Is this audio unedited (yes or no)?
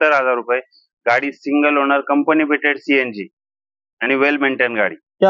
yes